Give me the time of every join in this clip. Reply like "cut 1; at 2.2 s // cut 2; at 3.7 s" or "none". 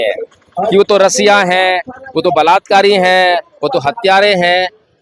none